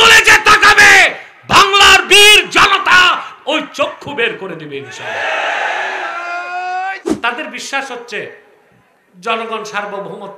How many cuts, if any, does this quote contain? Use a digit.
1